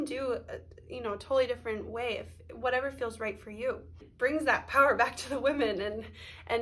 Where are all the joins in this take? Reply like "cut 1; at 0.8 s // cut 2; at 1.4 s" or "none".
cut 1; at 4.1 s